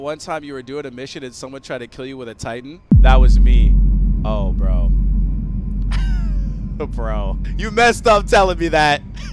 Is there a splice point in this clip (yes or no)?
yes